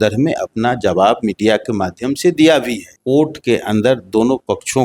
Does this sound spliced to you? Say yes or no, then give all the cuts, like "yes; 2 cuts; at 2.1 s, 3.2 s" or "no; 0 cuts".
yes; 1 cut; at 2.9 s